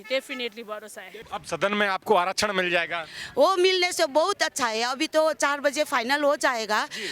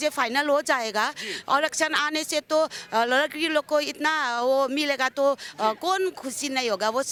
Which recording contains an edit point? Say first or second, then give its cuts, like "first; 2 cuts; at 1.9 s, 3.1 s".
first; 1 cut; at 1.3 s